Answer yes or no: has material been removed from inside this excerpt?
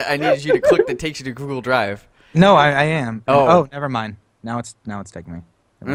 no